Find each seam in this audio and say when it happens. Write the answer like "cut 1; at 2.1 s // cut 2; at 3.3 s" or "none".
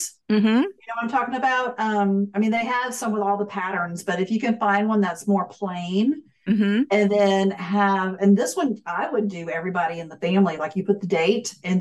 none